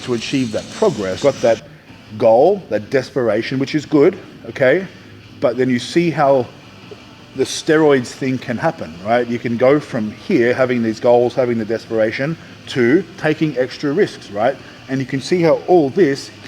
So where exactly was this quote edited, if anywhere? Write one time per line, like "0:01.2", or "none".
0:01.2